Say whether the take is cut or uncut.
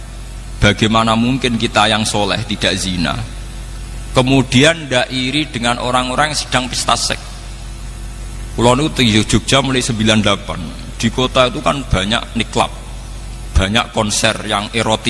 uncut